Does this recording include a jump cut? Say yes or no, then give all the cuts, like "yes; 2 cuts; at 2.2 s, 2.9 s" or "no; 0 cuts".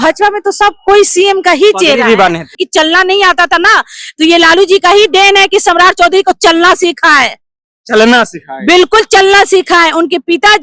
yes; 1 cut; at 2.6 s